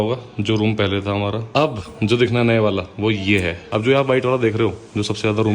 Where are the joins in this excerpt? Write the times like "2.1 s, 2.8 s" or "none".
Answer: 1.4 s, 3.6 s